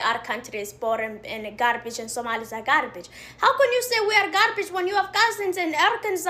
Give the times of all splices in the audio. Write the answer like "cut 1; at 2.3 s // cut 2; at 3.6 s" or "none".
none